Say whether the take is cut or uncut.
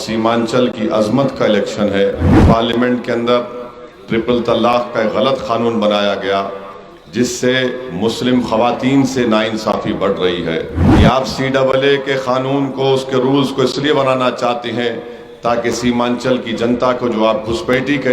cut